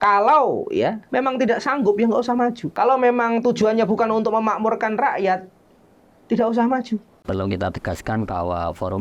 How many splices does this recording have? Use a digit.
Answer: 3